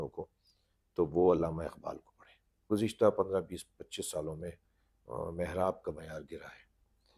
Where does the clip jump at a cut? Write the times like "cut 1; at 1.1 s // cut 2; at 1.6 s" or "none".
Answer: cut 1; at 2.6 s